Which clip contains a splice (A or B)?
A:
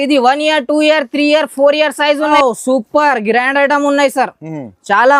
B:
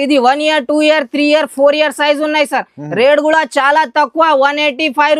A